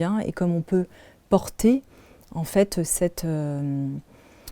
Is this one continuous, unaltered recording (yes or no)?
yes